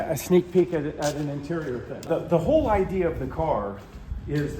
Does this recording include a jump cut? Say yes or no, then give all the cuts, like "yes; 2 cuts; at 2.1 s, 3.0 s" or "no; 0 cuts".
yes; 1 cut; at 2.0 s